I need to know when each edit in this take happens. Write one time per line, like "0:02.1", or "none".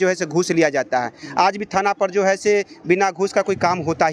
none

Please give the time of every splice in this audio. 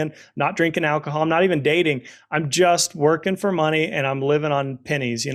none

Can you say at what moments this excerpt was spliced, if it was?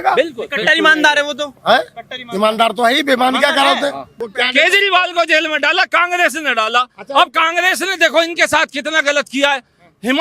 0:04.1

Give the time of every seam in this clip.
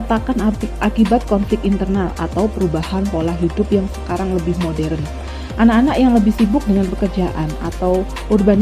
none

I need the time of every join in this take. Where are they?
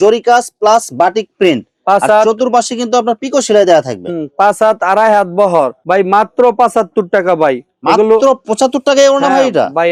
none

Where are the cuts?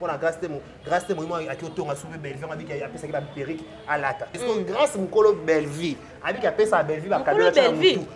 0:04.4

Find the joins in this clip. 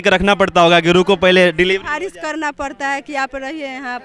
none

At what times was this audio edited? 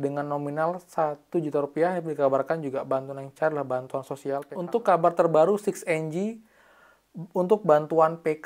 0:04.5

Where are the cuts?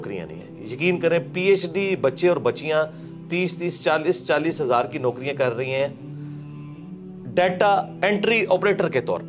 none

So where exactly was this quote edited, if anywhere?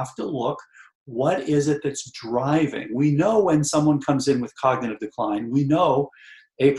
none

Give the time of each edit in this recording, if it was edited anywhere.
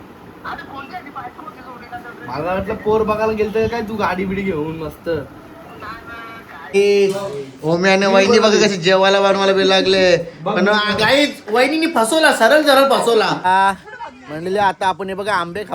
0:06.7
0:13.4

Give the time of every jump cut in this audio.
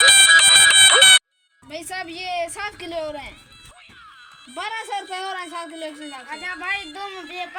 none

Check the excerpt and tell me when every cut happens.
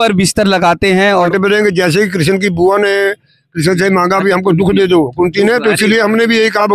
0:01.3

